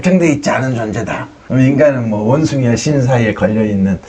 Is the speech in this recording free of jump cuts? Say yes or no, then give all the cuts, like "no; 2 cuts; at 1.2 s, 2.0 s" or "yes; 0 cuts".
yes; 0 cuts